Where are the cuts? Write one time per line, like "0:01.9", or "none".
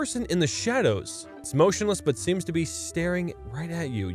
0:01.4